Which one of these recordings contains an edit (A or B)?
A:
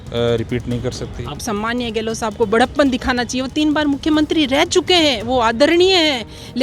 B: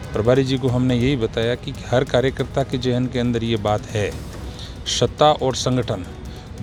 A